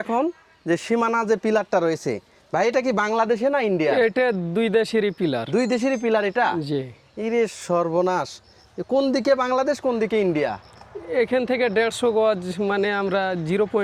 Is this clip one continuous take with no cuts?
yes; 0 cuts

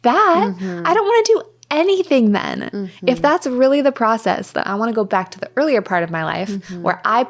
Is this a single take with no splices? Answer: yes; 0 cuts

